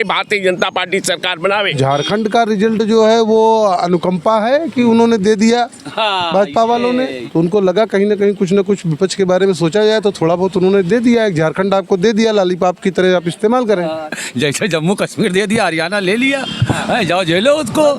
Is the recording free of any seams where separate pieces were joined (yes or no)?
no